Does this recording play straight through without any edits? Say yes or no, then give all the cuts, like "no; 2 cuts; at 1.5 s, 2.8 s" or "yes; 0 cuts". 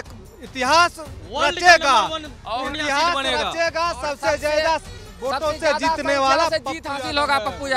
yes; 0 cuts